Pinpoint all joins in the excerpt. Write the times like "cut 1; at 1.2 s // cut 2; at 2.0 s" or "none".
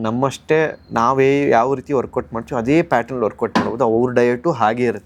none